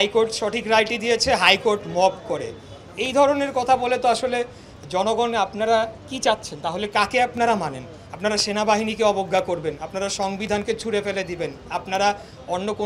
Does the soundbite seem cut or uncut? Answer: uncut